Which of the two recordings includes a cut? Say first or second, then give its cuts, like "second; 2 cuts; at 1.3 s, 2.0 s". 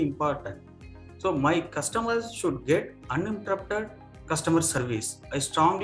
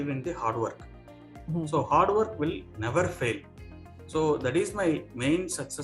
first; 1 cut; at 4.8 s